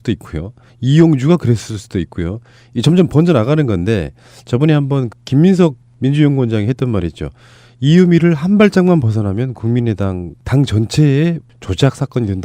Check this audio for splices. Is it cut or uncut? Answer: uncut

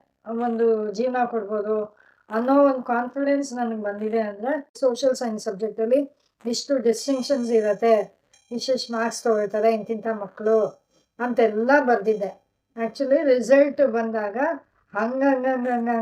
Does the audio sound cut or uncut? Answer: cut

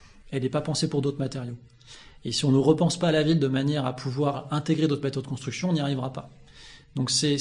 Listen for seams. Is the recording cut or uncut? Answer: uncut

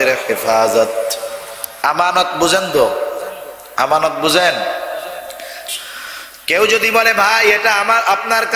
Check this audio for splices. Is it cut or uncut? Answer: cut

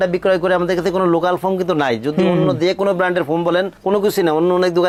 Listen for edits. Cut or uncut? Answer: uncut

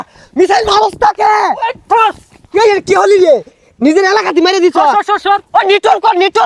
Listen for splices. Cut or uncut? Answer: uncut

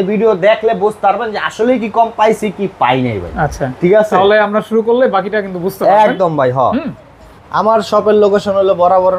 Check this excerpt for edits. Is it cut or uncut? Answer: uncut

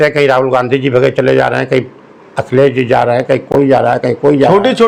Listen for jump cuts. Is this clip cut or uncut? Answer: uncut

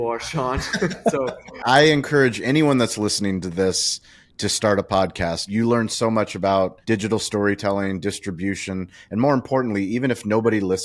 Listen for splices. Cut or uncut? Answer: cut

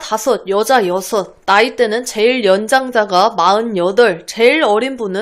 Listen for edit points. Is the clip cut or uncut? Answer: uncut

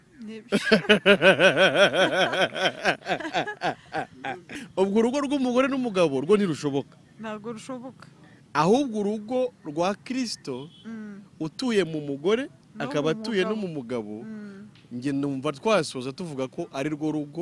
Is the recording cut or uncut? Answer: cut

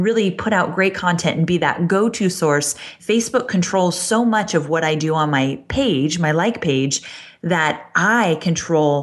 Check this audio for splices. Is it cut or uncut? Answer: cut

